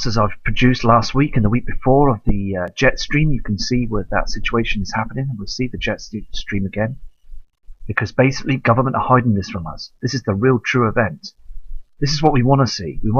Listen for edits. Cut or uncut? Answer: cut